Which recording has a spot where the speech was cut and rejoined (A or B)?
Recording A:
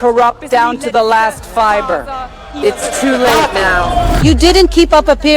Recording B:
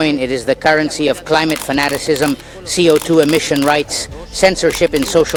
A